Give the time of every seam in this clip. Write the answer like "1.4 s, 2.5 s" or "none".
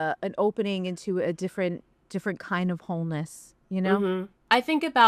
1.9 s, 4.0 s